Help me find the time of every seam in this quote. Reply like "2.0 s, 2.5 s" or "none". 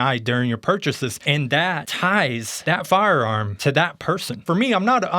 1.4 s, 2.5 s, 3.5 s, 4.4 s